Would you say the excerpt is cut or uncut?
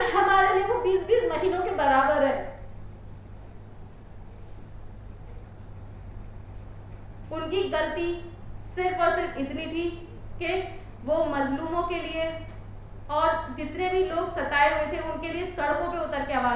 cut